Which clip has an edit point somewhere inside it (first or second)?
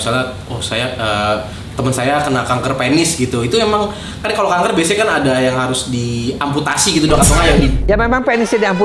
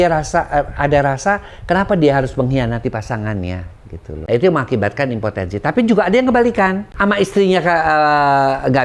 second